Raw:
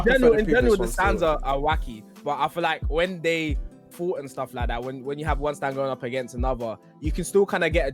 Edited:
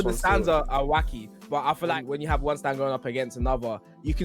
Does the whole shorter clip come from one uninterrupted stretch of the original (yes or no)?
no